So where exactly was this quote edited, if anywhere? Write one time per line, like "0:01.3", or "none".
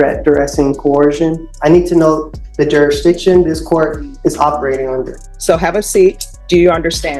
0:01.5
0:05.2
0:06.3